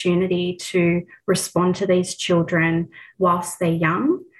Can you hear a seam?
yes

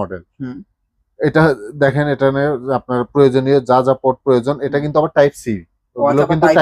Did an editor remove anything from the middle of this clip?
no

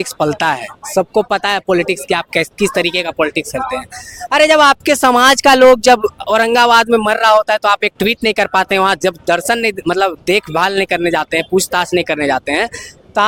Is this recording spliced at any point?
no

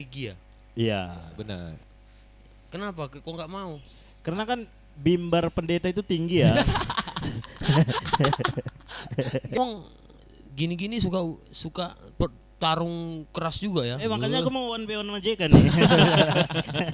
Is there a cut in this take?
yes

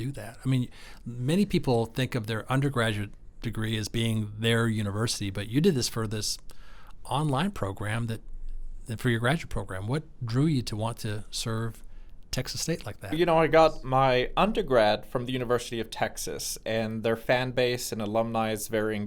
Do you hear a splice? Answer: no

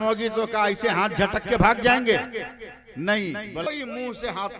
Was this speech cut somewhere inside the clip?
yes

